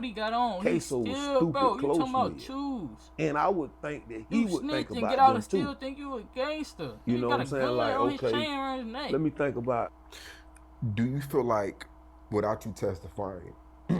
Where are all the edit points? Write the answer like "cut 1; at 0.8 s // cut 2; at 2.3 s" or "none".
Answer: cut 1; at 10.0 s